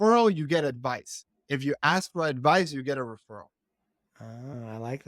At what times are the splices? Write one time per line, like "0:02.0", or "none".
none